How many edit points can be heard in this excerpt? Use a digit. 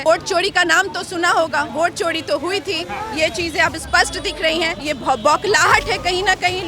2